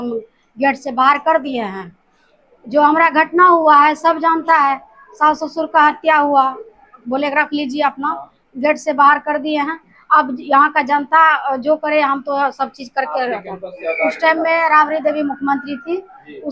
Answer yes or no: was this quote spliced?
yes